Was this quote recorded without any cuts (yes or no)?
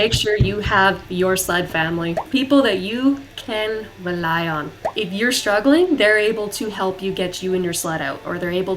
no